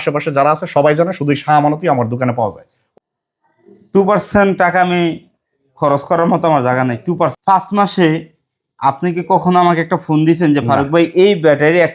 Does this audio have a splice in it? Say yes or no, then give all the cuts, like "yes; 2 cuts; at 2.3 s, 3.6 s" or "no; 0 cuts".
yes; 2 cuts; at 2.8 s, 7.4 s